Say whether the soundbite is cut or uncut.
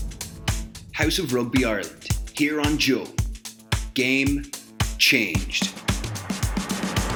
uncut